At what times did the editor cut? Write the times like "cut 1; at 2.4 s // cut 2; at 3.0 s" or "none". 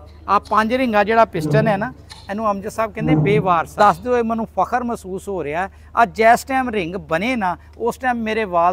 cut 1; at 3.7 s